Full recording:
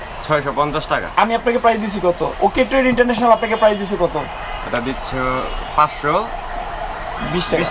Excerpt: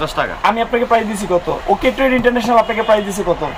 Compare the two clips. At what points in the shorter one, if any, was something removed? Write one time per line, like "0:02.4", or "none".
none

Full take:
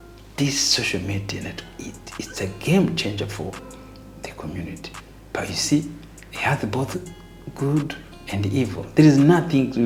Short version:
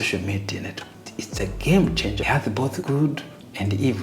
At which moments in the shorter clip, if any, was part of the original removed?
0:01.0
0:02.3

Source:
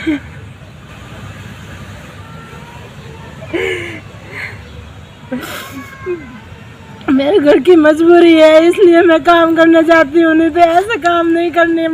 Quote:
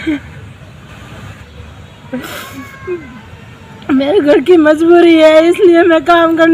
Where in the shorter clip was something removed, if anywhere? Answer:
0:01.4

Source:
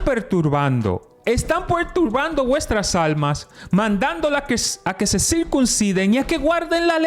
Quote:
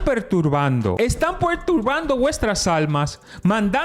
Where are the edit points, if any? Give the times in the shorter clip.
0:00.9

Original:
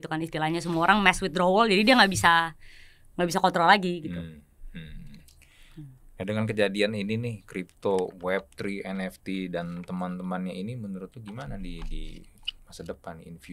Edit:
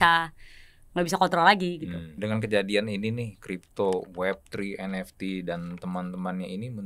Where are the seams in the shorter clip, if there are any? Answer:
0:02.1

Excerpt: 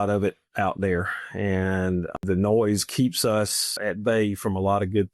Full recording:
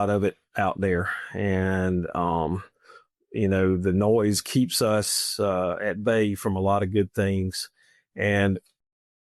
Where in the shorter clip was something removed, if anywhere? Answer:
0:02.2
0:03.8

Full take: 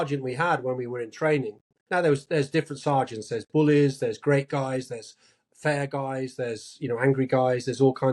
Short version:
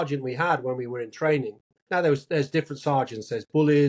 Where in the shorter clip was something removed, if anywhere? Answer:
none

